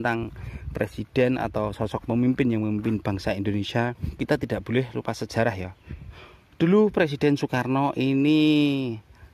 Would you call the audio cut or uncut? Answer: cut